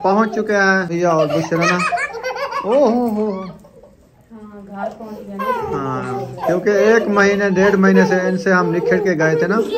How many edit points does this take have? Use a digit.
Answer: 1